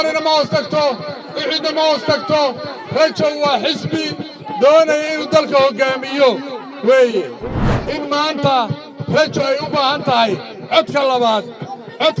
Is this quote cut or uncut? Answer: cut